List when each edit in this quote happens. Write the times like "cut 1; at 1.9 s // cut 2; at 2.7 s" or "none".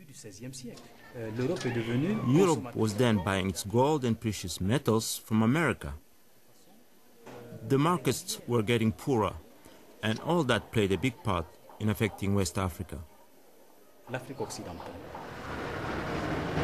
none